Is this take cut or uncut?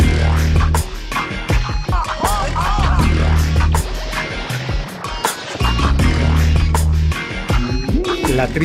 uncut